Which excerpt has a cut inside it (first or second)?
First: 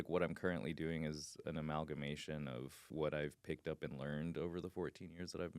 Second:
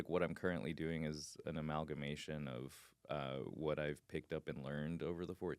first